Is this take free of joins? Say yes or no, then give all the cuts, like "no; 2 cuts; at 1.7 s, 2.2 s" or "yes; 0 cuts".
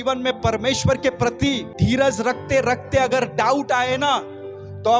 no; 1 cut; at 1.7 s